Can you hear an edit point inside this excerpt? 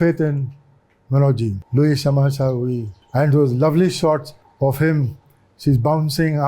yes; 3 cuts; at 1.6 s, 2.9 s, 4.4 s

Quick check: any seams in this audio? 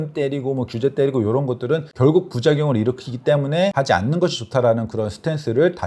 yes; 2 cuts; at 1.9 s, 3.7 s

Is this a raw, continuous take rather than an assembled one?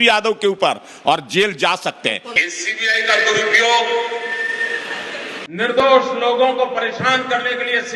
no; 1 cut; at 2.4 s

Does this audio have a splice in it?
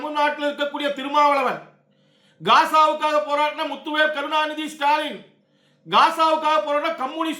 no; 0 cuts

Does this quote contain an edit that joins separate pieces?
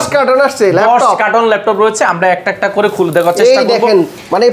no; 0 cuts

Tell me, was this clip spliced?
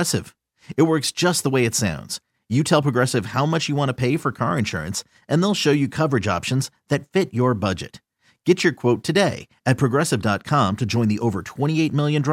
no; 0 cuts

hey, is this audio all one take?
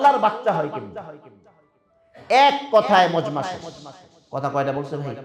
yes; 0 cuts

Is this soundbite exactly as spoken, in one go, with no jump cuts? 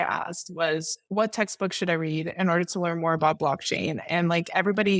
no; 1 cut; at 1.0 s

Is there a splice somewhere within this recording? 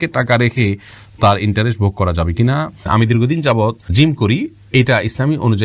yes; 2 cuts; at 2.9 s, 3.8 s

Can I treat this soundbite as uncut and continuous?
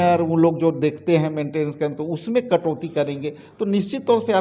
yes; 0 cuts

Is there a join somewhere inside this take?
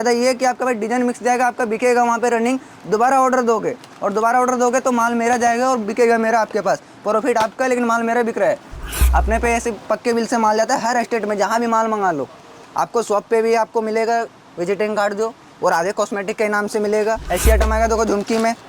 yes; 2 cuts; at 8.8 s, 17.2 s

